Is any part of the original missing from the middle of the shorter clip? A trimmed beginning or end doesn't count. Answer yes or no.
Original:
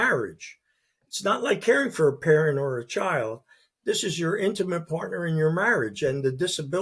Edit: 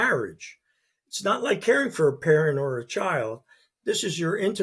no